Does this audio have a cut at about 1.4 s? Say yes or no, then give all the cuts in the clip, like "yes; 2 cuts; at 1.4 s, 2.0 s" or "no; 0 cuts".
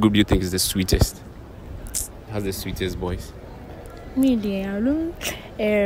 no; 0 cuts